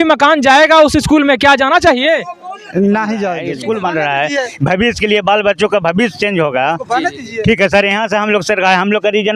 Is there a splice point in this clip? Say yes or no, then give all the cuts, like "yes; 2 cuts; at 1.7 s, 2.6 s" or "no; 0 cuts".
yes; 1 cut; at 3.5 s